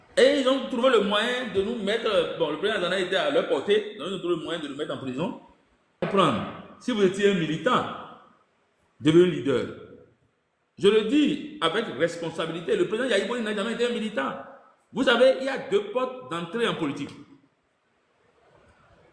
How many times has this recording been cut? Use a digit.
1